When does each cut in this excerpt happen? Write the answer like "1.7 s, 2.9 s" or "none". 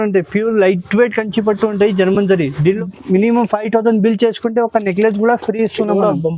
2.8 s